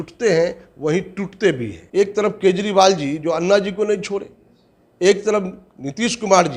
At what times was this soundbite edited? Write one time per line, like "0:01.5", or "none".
0:01.8